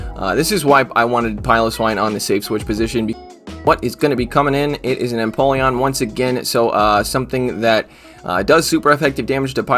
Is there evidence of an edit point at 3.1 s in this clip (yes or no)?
yes